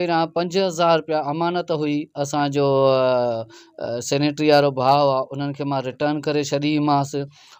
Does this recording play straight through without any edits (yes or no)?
yes